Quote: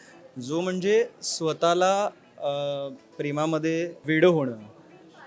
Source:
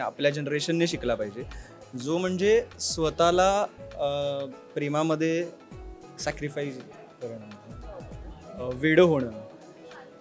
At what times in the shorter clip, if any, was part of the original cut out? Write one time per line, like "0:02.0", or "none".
0:04.0